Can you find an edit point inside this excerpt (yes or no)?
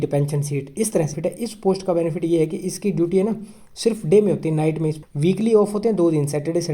yes